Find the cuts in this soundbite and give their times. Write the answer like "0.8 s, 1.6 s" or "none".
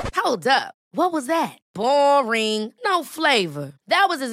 none